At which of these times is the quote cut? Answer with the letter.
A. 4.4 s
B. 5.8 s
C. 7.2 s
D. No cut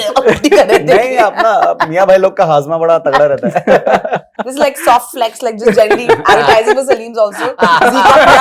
A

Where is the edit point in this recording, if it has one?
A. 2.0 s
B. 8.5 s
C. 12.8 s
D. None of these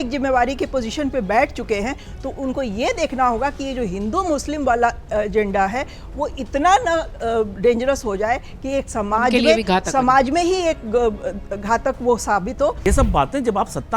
C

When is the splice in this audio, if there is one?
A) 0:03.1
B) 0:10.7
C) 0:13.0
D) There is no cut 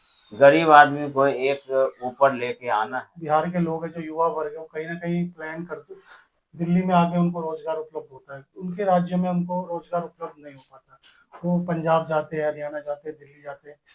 A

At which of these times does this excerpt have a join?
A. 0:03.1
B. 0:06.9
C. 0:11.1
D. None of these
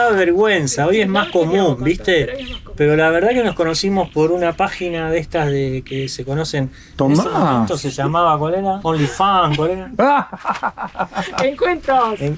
D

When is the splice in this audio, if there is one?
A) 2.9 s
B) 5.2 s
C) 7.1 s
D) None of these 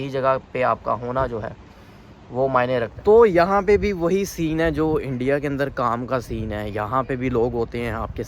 A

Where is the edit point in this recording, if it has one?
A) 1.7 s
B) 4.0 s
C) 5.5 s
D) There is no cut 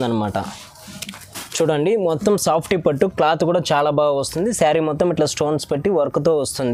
D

